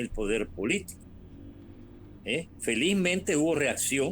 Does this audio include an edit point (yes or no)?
no